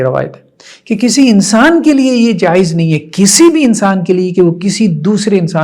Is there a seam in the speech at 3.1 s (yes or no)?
no